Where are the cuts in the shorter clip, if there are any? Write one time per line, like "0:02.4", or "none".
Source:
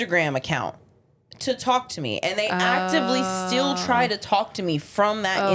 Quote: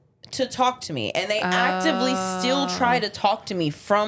none